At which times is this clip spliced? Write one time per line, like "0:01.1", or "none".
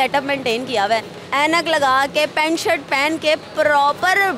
none